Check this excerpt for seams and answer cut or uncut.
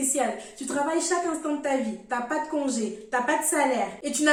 uncut